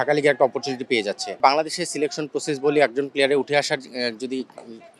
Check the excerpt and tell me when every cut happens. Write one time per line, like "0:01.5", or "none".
0:01.4